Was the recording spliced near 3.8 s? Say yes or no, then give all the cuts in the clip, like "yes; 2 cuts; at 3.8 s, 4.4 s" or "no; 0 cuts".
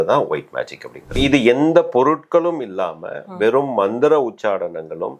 no; 1 cut; at 1.2 s